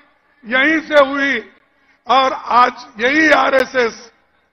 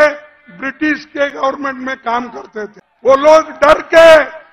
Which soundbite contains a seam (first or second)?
second